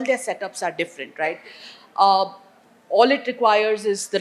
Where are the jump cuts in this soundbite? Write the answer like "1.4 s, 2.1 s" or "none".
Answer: none